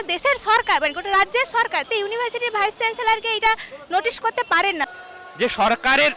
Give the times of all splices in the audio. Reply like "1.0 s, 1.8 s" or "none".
1.9 s, 4.9 s